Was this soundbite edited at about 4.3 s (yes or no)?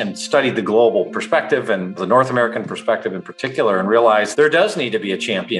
yes